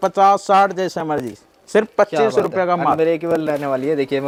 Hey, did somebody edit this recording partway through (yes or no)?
no